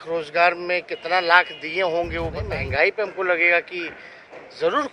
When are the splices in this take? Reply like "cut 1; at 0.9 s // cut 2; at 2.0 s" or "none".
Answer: cut 1; at 2.4 s